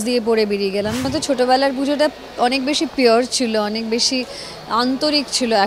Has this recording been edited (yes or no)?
yes